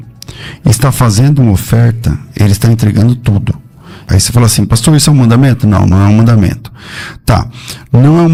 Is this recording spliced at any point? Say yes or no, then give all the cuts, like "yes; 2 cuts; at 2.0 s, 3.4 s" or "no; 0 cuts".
no; 0 cuts